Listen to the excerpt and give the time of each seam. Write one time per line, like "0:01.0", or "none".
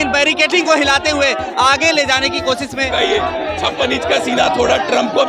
0:02.9